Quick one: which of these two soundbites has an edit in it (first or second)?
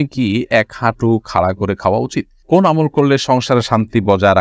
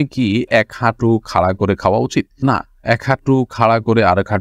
first